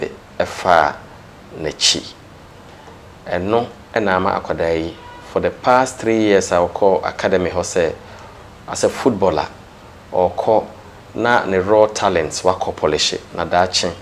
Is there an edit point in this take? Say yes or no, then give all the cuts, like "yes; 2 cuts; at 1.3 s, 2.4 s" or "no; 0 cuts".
no; 0 cuts